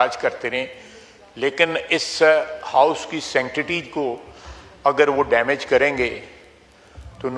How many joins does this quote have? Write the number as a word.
zero